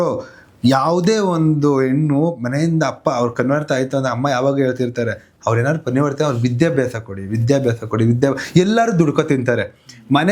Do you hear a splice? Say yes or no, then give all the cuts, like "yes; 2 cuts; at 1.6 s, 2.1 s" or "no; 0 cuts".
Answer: no; 0 cuts